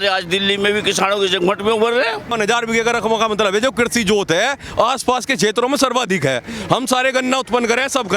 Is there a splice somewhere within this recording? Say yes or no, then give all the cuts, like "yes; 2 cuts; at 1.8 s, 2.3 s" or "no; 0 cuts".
yes; 1 cut; at 2.3 s